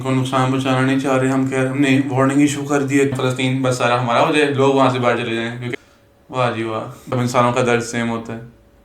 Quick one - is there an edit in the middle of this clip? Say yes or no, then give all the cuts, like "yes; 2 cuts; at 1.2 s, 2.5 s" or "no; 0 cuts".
yes; 3 cuts; at 3.2 s, 5.7 s, 7.1 s